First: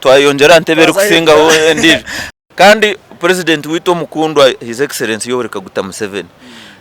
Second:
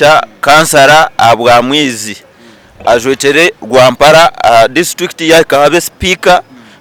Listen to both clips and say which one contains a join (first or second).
first